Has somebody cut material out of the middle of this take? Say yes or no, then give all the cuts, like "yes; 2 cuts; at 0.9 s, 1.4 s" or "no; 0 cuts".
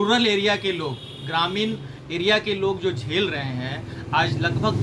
no; 0 cuts